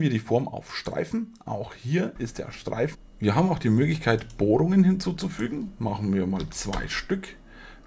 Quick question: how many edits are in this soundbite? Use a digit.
1